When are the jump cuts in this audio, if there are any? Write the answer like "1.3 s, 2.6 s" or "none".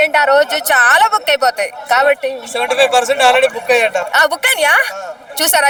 none

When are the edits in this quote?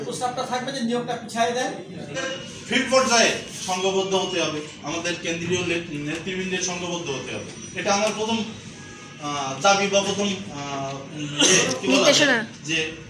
2.0 s

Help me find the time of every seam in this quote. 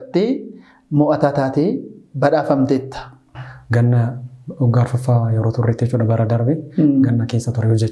3.4 s

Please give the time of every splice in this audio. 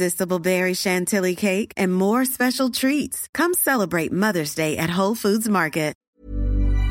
6.0 s

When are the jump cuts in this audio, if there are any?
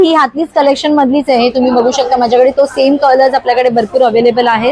none

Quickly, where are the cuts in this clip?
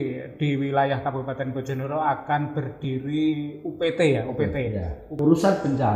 5.0 s

